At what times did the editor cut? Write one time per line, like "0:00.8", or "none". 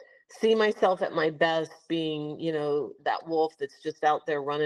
none